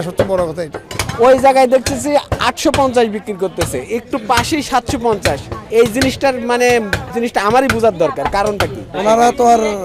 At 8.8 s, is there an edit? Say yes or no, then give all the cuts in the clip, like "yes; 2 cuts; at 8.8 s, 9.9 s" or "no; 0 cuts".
yes; 4 cuts; at 1.0 s, 5.5 s, 7.0 s, 8.8 s